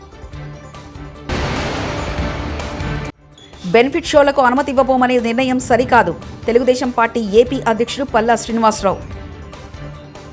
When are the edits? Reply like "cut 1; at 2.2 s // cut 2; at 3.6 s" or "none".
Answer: none